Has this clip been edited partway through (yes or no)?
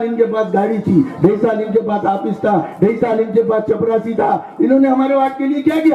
no